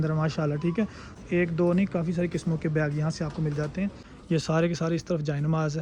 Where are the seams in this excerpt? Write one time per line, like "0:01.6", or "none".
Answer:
0:01.1
0:04.1

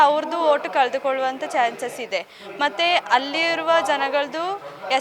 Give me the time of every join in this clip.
none

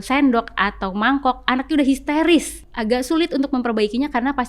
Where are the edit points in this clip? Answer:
0:02.7

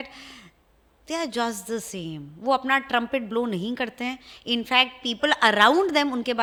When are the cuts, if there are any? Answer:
none

